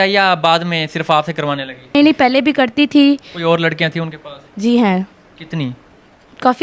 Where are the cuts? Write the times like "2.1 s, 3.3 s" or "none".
1.9 s, 3.3 s